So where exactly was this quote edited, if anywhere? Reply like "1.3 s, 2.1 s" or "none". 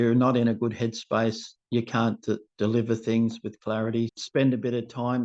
4.1 s